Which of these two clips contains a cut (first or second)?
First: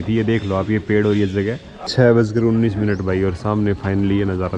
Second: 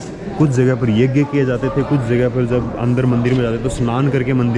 first